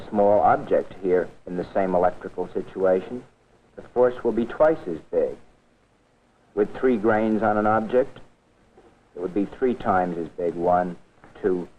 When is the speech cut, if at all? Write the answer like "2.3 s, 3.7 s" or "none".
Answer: 2.7 s